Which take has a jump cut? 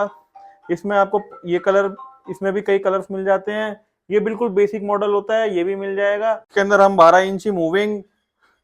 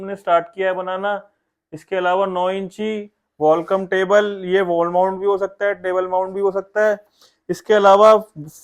first; 1 cut; at 6.4 s

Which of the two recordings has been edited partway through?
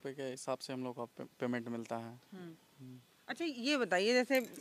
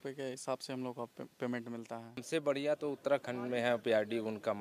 second; 1 cut; at 2.2 s

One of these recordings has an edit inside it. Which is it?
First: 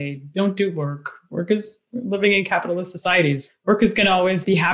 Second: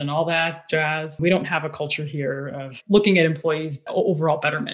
second; 2 cuts; at 1.2 s, 3.9 s

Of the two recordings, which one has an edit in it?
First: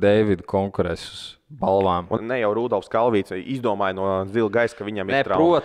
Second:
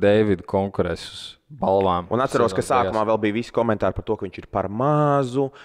first; 1 cut; at 2.2 s

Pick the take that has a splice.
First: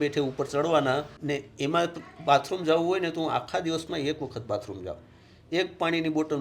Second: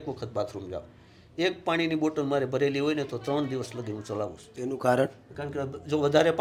first; 1 cut; at 1.1 s

